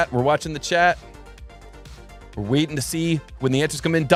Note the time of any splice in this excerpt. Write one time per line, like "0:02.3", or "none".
none